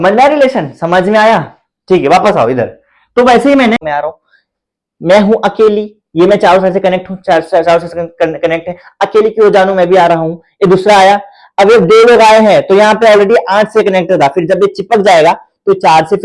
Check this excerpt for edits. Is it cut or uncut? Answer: cut